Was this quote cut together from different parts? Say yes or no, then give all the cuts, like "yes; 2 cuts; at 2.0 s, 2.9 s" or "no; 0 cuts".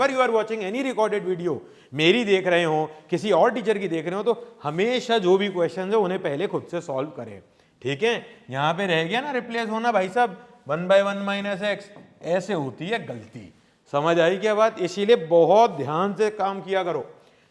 no; 0 cuts